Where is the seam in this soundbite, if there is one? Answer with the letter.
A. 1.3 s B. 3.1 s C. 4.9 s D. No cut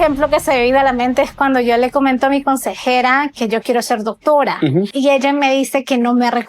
C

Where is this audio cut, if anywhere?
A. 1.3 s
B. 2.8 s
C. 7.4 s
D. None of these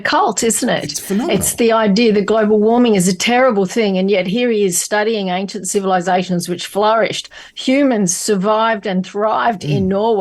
D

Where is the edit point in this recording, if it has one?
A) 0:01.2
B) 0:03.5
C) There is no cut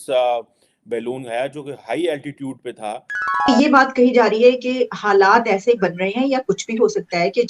B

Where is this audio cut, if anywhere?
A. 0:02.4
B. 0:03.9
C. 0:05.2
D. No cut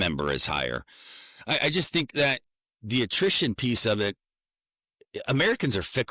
A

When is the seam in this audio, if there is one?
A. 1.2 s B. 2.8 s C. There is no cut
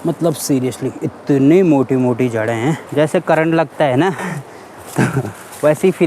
B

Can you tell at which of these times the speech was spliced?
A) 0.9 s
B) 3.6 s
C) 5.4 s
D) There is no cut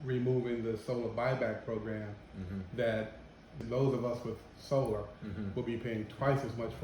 B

